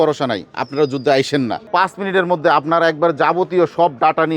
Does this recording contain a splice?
yes; 1 cut; at 1.7 s

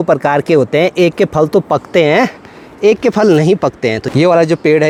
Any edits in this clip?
no; 0 cuts

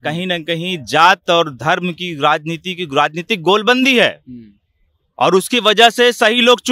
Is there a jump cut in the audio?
no; 0 cuts

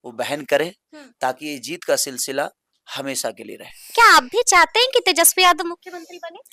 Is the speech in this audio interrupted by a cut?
yes; 1 cut; at 3.9 s

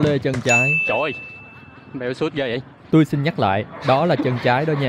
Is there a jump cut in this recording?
no; 0 cuts

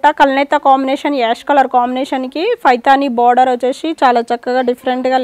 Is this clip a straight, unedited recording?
yes; 0 cuts

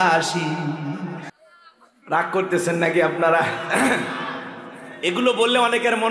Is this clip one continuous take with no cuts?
no; 1 cut; at 1.3 s

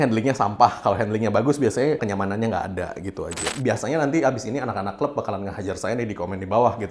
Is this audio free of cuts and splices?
no; 2 cuts; at 2.0 s, 3.5 s

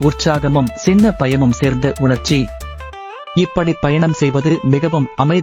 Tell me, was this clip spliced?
no; 0 cuts

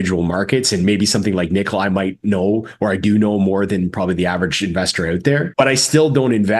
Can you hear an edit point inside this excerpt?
yes; 1 cut; at 5.5 s

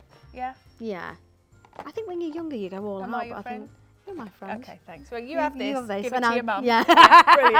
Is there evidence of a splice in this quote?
no; 0 cuts

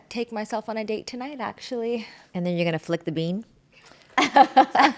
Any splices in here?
yes; 1 cut; at 2.2 s

